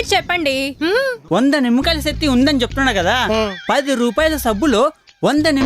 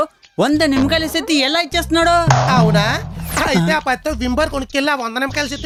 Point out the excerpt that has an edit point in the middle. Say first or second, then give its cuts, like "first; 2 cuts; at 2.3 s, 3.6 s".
first; 1 cut; at 1.2 s